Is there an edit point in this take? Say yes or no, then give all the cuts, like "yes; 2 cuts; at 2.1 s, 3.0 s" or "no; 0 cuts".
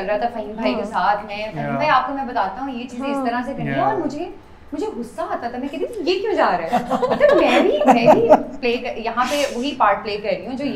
no; 0 cuts